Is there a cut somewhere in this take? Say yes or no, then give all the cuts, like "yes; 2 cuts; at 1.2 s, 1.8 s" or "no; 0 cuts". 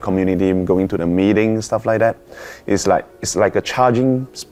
no; 0 cuts